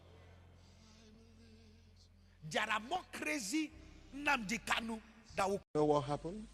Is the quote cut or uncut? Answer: cut